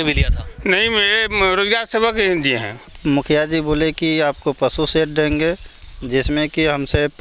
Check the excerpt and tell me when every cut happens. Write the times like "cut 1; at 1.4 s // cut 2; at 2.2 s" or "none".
cut 1; at 3.0 s